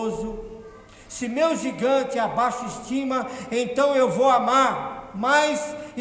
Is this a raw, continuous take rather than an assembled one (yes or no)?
yes